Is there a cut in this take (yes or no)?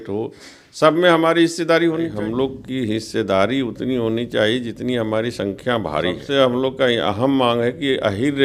yes